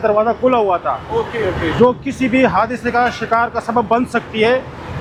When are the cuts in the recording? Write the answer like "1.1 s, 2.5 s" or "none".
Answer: none